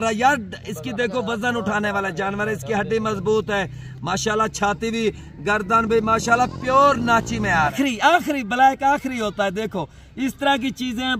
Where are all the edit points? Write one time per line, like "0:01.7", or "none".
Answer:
0:07.7